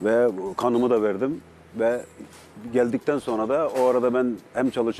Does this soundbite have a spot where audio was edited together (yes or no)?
no